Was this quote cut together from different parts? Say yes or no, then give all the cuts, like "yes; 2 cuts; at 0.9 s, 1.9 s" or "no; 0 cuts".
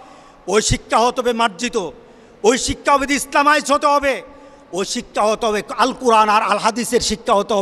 no; 0 cuts